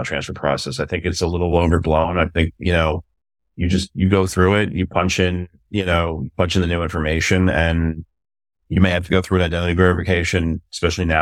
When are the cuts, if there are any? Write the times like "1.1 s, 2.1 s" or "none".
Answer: none